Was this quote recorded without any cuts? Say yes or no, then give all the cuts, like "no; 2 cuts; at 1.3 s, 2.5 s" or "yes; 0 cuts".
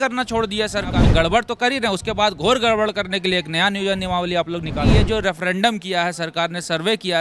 no; 2 cuts; at 1.0 s, 4.9 s